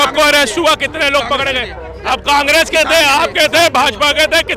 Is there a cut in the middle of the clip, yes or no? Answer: no